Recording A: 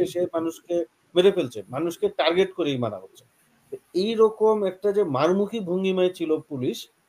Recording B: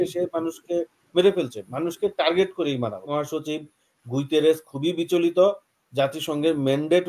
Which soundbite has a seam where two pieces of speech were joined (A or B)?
B